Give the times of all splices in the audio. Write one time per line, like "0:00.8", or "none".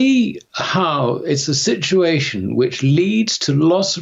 none